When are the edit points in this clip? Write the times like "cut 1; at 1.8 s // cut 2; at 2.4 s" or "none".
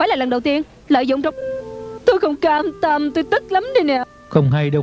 cut 1; at 1.3 s // cut 2; at 4.0 s